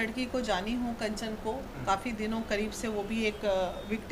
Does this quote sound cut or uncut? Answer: uncut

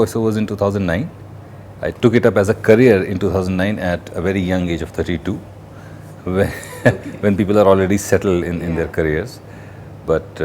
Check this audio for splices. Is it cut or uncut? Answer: uncut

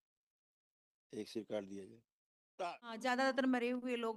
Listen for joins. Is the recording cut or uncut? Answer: cut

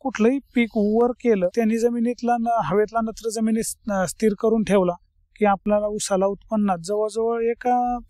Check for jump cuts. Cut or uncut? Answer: cut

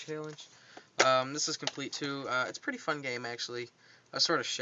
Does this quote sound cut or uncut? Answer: uncut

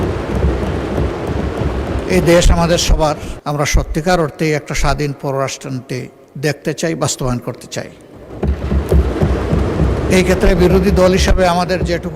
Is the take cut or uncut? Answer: cut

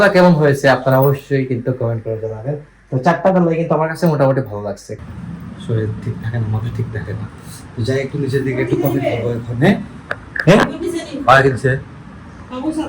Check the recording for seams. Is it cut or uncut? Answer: cut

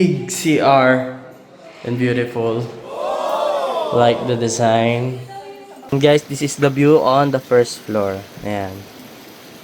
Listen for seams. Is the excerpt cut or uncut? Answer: cut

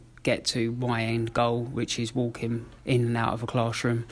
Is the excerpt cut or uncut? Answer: cut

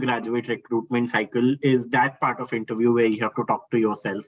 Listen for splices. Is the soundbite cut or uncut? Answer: uncut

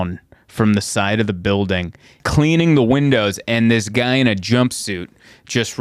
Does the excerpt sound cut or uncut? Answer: cut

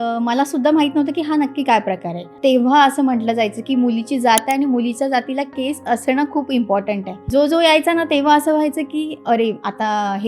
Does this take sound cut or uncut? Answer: cut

